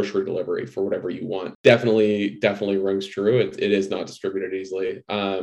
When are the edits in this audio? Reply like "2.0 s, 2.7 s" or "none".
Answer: 1.5 s